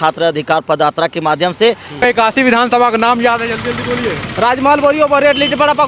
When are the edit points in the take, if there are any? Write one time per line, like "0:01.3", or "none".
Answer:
0:01.9